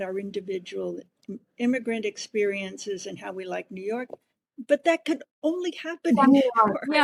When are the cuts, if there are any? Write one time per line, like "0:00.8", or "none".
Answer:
none